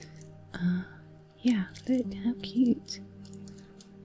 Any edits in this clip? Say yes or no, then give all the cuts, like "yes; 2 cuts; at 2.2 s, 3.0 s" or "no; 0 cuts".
yes; 1 cut; at 2.9 s